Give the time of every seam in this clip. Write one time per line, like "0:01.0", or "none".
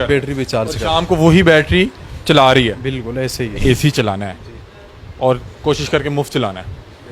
0:03.6